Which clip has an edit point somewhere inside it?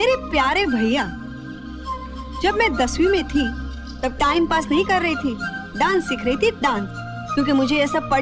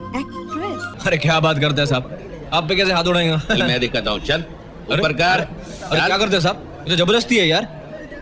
second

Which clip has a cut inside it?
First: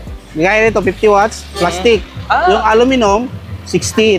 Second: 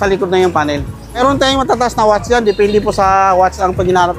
second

